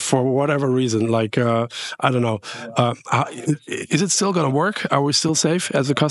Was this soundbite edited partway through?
no; 0 cuts

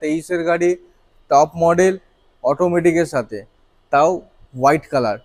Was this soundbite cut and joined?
no; 0 cuts

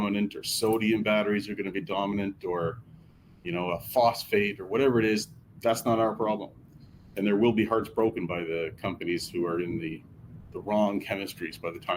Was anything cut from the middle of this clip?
no; 0 cuts

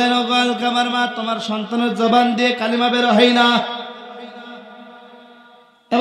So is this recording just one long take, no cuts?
yes; 0 cuts

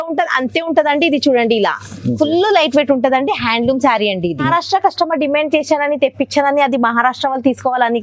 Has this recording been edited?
yes; 1 cut; at 4.4 s

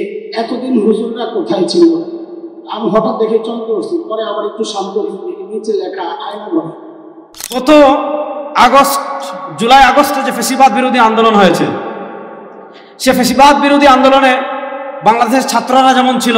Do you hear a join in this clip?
yes; 1 cut; at 7.6 s

